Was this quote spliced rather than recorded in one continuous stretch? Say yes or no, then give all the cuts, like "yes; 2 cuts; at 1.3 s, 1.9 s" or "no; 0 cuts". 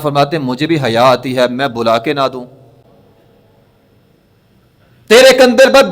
yes; 1 cut; at 2.8 s